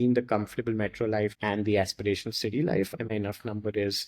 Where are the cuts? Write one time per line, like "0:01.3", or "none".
0:03.1